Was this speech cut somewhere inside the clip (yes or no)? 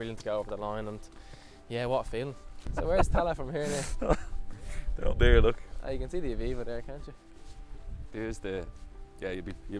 yes